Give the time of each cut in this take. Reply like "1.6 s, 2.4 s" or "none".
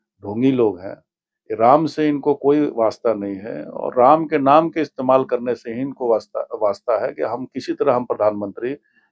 none